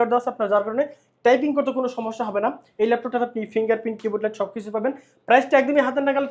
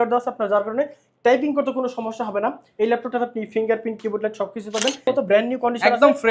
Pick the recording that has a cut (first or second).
second